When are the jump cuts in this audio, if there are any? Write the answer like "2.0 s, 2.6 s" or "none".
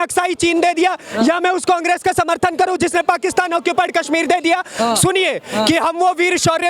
4.7 s